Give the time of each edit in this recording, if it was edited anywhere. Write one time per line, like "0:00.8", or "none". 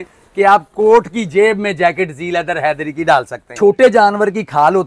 0:03.5